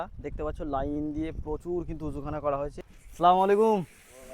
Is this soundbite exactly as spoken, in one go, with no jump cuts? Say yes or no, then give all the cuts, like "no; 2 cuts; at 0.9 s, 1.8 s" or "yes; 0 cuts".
no; 1 cut; at 2.8 s